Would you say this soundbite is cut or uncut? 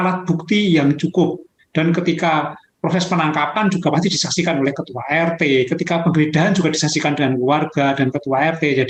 uncut